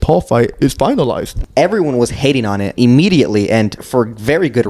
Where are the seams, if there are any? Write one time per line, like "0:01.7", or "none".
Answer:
0:01.4
0:02.7
0:03.8